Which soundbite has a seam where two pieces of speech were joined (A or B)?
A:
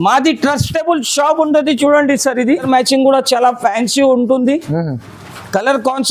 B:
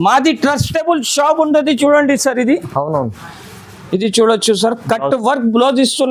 A